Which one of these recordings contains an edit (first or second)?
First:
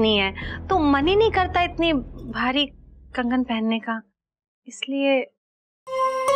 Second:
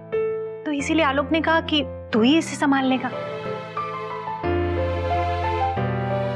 second